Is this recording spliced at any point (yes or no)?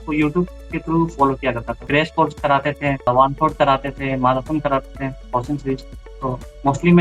yes